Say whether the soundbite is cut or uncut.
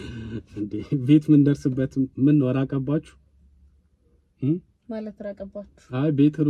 uncut